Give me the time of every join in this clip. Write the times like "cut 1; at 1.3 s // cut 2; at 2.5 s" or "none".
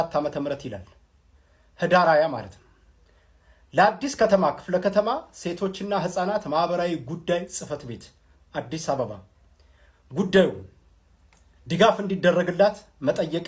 none